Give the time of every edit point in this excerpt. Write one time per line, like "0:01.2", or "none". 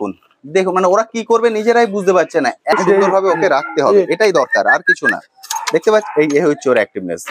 0:02.8

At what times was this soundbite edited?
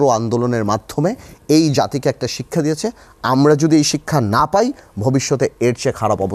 none

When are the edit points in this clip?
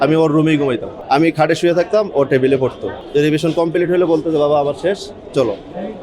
0:00.9
0:03.0

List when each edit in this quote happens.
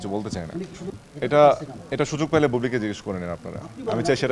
0:00.9

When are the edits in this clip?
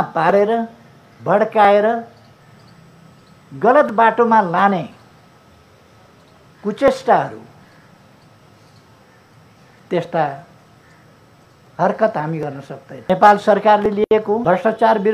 0:12.9
0:14.4

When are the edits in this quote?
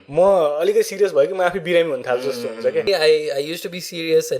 0:02.9

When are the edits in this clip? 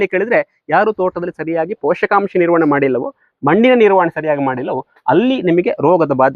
none

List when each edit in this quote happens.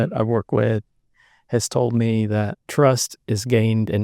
0:02.6

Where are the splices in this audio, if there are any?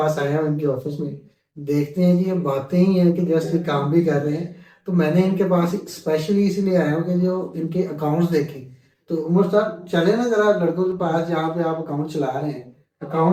none

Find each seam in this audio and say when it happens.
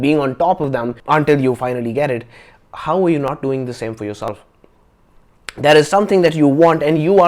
0:01.0

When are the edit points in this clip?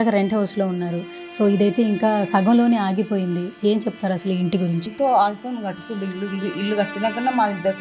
0:04.9

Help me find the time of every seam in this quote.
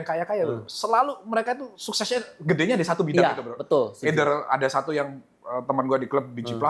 none

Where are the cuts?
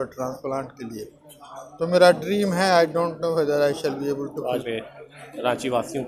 none

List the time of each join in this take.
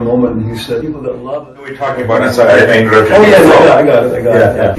0:01.9

